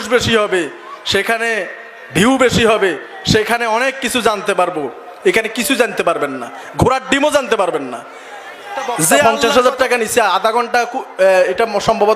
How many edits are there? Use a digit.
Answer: 1